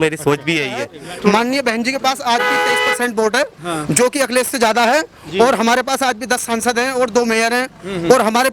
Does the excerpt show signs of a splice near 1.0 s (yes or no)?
yes